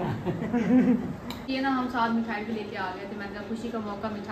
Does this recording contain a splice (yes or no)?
yes